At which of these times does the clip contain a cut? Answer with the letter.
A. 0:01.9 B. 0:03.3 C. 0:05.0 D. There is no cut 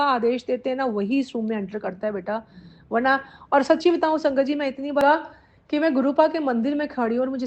C